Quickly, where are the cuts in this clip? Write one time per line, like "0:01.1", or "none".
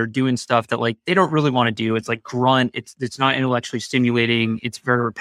none

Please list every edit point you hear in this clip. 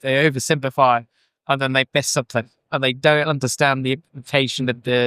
0:02.6

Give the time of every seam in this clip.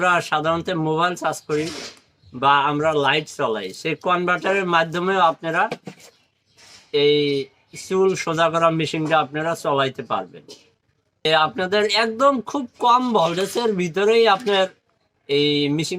0:11.3

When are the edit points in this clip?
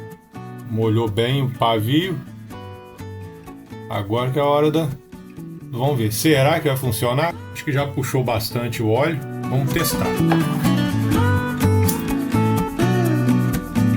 0:07.5

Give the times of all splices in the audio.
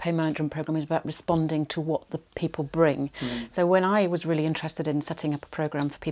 none

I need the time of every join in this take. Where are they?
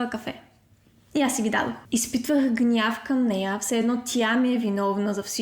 0:01.8

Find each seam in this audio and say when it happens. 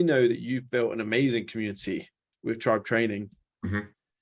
0:02.2

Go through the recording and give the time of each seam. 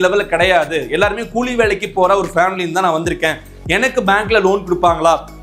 none

